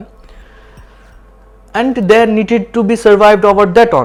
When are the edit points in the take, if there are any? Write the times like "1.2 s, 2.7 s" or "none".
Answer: none